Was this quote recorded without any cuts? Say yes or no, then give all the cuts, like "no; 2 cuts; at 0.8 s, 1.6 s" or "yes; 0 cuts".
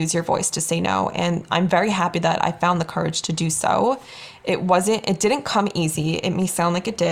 yes; 0 cuts